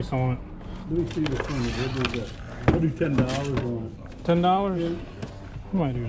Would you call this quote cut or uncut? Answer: uncut